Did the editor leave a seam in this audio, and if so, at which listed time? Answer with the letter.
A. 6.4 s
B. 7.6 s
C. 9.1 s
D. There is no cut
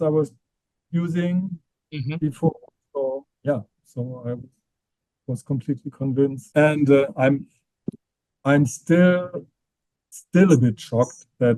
A